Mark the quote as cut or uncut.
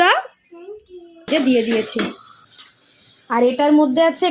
cut